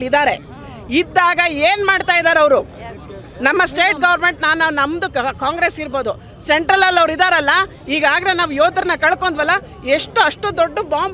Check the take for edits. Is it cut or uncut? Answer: uncut